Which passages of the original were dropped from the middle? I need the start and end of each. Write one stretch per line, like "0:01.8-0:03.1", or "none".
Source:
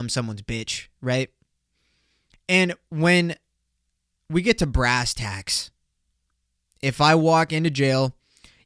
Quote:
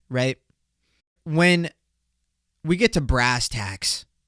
0:02.1-0:02.8